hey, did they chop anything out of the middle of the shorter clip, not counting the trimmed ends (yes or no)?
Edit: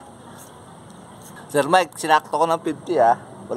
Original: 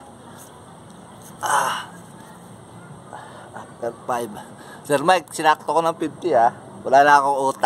yes